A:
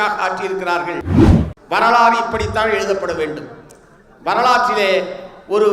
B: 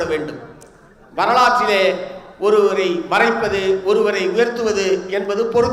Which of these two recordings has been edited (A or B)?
A